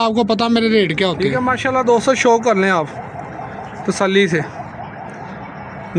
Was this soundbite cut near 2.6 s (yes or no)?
no